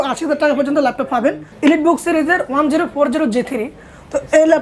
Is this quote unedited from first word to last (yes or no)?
no